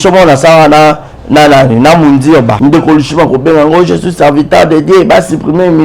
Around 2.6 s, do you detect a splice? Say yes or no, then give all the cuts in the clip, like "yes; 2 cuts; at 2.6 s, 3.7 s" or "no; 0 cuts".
yes; 1 cut; at 2.6 s